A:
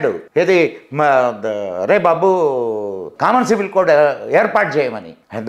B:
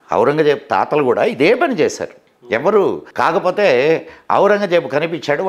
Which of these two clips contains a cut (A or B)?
B